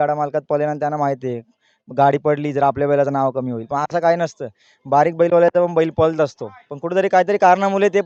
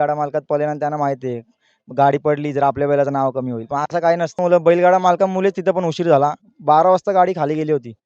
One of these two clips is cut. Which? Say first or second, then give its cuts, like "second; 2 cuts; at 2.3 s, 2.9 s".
second; 1 cut; at 4.4 s